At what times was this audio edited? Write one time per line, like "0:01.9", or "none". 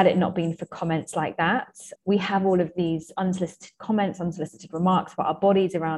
0:01.8